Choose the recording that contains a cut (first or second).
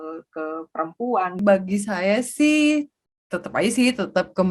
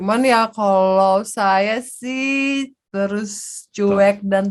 first